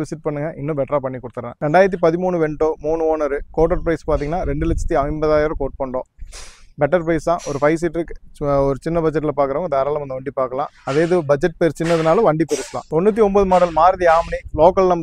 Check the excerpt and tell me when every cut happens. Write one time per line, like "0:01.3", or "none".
none